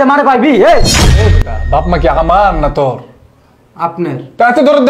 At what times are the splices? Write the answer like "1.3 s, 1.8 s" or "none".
1.3 s